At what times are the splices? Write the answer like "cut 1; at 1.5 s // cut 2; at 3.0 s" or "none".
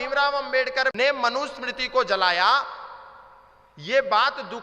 cut 1; at 0.9 s

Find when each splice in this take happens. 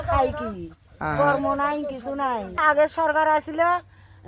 cut 1; at 2.6 s

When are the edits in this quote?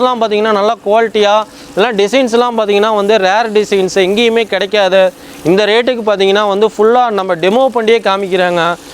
none

